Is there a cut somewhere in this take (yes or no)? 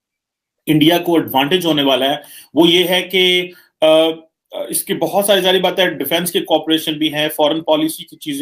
no